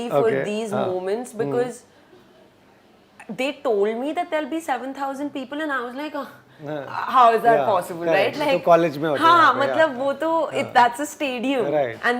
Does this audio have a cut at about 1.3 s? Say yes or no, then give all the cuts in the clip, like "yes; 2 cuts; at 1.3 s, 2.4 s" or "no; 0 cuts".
no; 0 cuts